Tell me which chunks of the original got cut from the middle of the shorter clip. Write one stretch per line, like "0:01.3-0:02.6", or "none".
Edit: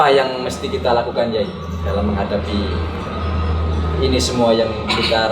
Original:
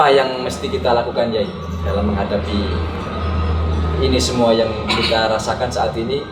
none